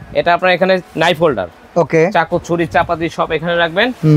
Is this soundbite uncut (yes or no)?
yes